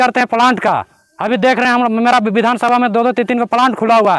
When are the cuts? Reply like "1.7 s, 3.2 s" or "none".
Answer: none